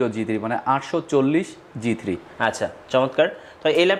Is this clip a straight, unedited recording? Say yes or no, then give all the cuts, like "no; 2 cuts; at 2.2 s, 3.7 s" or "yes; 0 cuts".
yes; 0 cuts